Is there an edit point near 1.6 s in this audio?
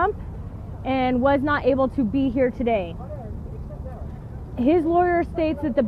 yes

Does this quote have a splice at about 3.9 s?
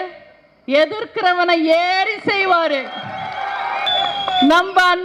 yes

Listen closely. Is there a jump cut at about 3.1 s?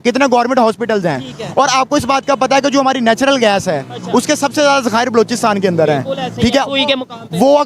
no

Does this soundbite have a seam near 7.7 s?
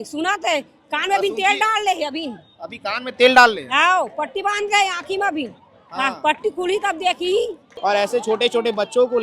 yes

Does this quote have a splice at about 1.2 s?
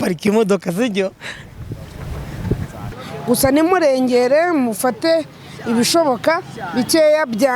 no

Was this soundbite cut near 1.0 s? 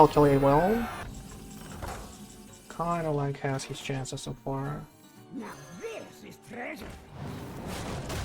yes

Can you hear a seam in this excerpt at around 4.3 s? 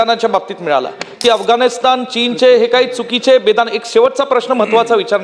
no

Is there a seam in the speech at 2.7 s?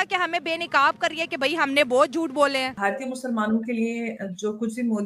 yes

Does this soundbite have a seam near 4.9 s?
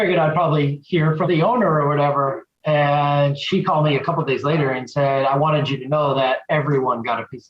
no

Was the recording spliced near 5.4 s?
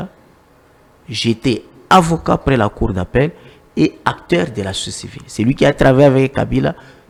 no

